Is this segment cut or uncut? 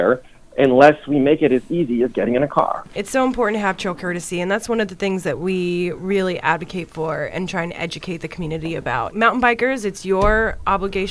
cut